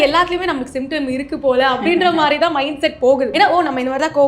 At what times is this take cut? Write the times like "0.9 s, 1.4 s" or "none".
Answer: 3.3 s